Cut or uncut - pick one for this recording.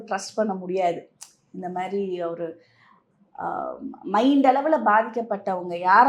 uncut